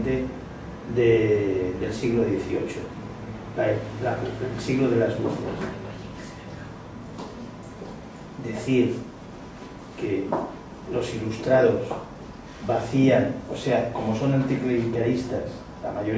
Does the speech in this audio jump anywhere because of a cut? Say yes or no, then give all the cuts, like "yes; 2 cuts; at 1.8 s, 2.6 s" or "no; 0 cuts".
no; 0 cuts